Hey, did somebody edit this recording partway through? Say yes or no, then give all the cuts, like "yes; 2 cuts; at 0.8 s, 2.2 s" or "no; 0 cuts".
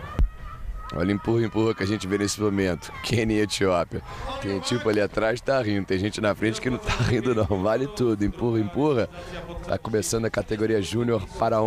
no; 0 cuts